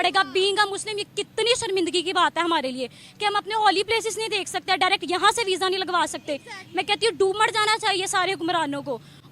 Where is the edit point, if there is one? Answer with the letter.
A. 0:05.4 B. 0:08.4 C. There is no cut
C